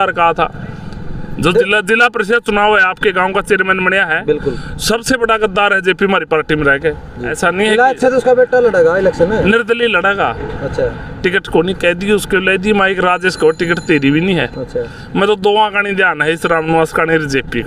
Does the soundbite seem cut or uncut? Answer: cut